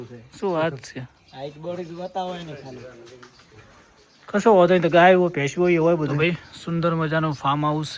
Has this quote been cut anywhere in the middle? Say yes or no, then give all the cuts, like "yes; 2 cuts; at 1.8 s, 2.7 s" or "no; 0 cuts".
yes; 2 cuts; at 2.5 s, 6.1 s